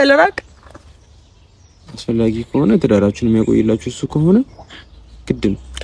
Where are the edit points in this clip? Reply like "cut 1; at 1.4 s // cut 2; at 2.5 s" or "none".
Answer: none

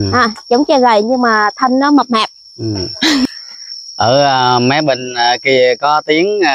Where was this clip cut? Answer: cut 1; at 3.3 s

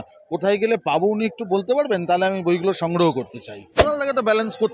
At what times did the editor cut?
cut 1; at 3.8 s

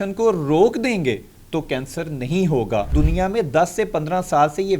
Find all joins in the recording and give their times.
cut 1; at 2.9 s

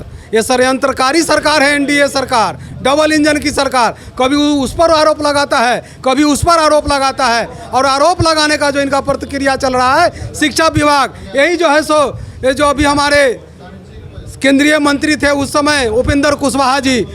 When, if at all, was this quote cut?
none

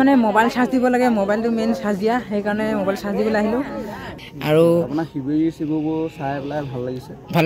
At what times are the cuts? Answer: cut 1; at 4.1 s

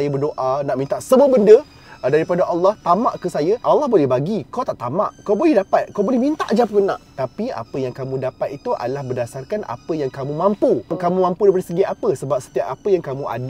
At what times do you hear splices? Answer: cut 1; at 3.6 s // cut 2; at 7.1 s

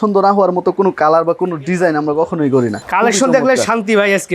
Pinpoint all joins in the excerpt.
cut 1; at 2.8 s

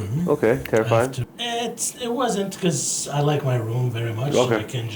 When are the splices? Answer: cut 1; at 1.3 s

